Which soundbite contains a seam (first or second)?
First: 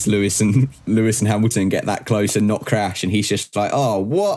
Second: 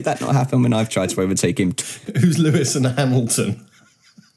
second